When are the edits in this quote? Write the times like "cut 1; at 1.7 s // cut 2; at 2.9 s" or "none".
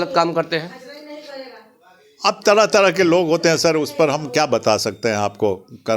none